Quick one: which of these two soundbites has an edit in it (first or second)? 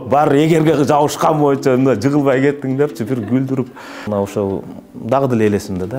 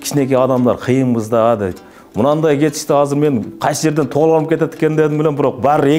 first